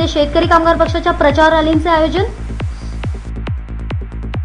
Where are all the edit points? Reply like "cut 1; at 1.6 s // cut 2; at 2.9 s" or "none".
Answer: cut 1; at 3.0 s